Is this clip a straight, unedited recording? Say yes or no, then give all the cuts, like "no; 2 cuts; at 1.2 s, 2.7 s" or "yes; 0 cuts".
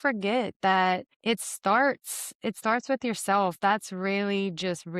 no; 1 cut; at 1.1 s